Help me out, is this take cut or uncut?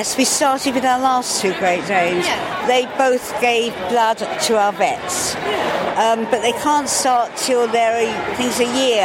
uncut